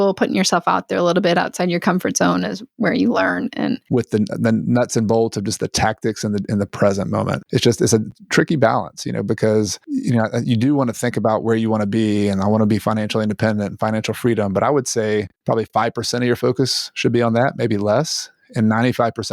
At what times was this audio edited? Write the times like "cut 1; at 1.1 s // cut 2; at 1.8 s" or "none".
cut 1; at 3.8 s